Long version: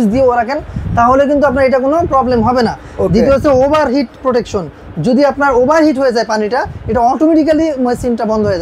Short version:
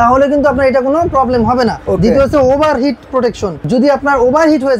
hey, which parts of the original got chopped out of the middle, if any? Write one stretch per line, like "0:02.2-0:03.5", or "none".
0:02.8-0:02.9
0:04.6-0:04.9